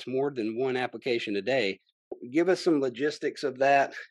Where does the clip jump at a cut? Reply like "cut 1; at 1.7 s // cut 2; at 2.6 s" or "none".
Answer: cut 1; at 2.1 s